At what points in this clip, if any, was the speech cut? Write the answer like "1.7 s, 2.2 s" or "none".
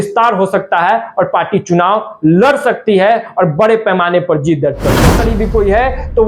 5.3 s

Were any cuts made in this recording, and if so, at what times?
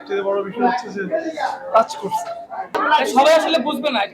2.8 s

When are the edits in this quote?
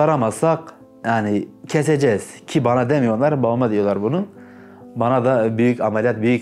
none

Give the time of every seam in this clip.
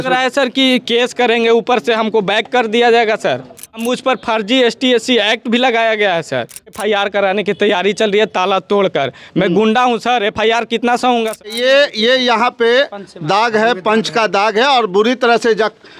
3.8 s, 6.8 s, 11.6 s

